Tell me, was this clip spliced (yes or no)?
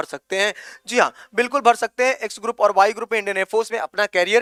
no